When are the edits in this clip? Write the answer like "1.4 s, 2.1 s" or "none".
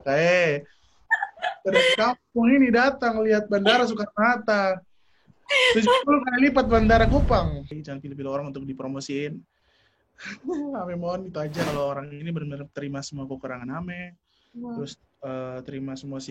7.7 s, 11.7 s